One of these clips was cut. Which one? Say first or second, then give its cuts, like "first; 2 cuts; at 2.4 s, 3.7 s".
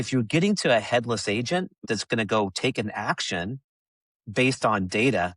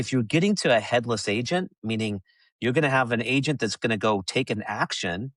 first; 1 cut; at 1.8 s